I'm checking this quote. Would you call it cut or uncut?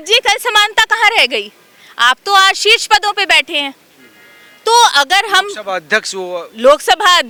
uncut